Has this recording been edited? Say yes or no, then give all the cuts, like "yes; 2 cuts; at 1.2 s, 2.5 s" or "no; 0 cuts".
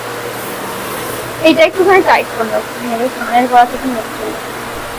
no; 0 cuts